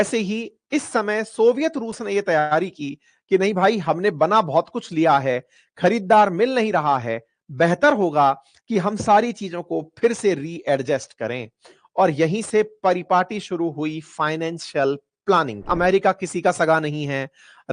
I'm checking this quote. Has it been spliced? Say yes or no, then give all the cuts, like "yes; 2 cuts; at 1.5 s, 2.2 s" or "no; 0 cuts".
yes; 1 cut; at 15.7 s